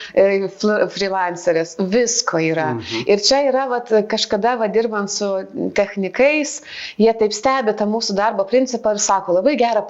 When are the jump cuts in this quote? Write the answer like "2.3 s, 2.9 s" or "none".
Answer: none